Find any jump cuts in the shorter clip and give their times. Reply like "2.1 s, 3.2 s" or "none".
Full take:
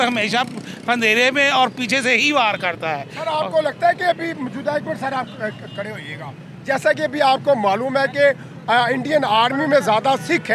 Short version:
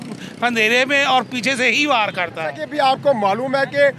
2.6 s